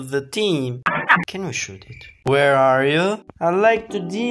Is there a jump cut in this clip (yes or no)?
yes